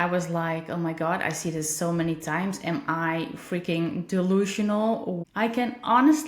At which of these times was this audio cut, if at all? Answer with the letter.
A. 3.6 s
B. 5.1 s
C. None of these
B